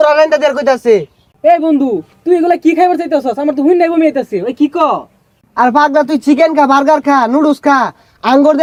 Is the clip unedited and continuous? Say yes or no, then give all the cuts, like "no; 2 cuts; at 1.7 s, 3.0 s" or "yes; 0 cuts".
yes; 0 cuts